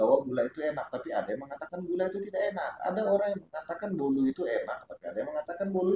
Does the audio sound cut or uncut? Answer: uncut